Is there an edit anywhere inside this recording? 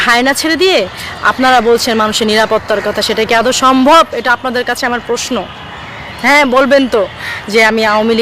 no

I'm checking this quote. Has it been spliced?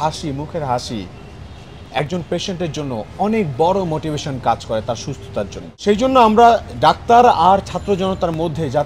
yes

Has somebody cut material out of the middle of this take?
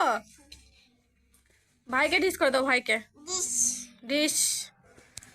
no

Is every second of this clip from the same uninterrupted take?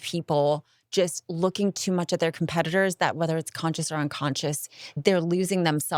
yes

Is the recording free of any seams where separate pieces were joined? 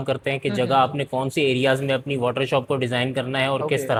yes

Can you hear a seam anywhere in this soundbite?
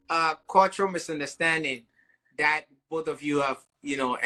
no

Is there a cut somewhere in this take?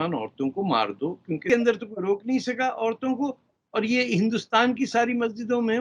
yes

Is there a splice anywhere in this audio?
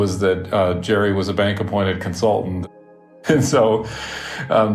yes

